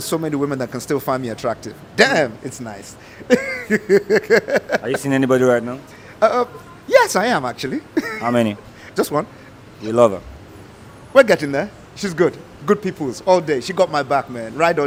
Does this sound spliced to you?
no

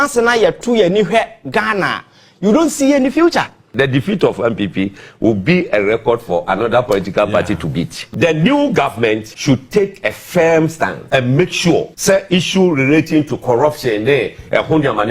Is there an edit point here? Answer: yes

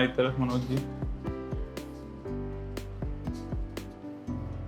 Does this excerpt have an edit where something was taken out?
yes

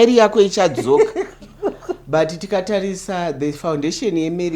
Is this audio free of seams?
no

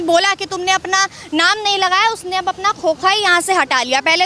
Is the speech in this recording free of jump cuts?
yes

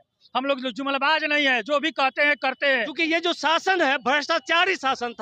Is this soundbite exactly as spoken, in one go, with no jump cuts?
no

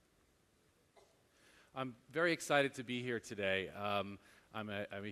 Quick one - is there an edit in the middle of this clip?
yes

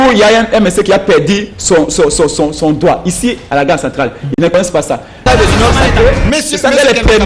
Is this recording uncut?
no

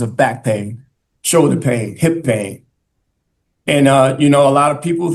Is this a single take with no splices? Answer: yes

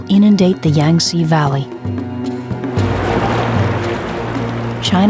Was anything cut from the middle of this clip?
yes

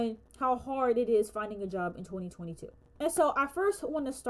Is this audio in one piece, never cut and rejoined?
yes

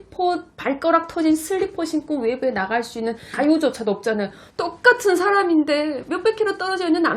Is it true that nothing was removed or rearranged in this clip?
no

